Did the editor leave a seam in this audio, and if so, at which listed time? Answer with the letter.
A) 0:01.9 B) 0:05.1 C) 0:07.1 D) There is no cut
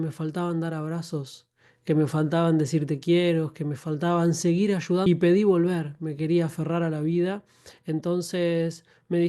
B